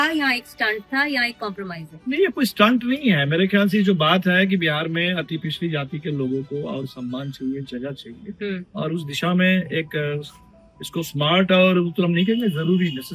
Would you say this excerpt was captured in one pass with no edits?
yes; 0 cuts

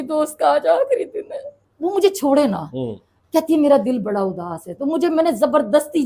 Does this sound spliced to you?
yes; 1 cut; at 1.6 s

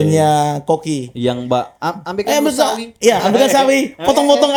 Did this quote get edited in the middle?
no; 0 cuts

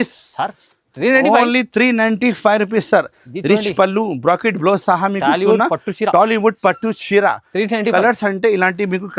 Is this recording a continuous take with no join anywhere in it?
yes; 0 cuts

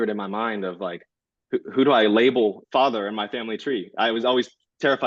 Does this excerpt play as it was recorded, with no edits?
yes; 0 cuts

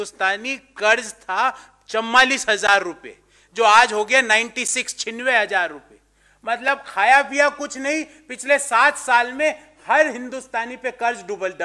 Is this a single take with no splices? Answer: yes; 0 cuts

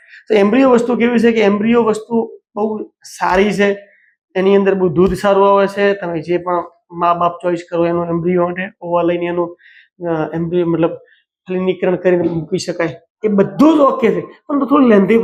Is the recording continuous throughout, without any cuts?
yes; 0 cuts

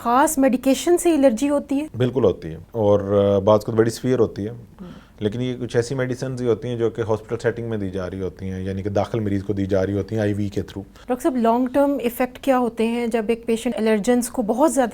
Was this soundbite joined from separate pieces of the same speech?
yes; 3 cuts; at 1.9 s, 2.6 s, 10.9 s

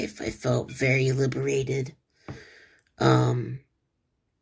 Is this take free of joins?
yes; 0 cuts

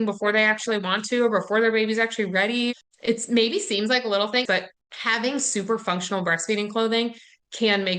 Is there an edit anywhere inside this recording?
yes; 2 cuts; at 2.7 s, 4.5 s

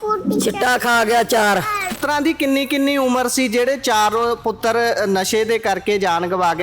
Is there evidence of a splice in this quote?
yes; 1 cut; at 1.9 s

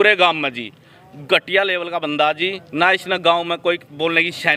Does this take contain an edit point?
no; 0 cuts

